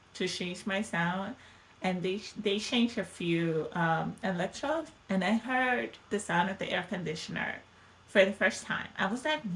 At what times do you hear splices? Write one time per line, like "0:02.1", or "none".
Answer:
none